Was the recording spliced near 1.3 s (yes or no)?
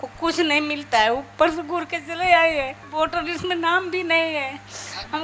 no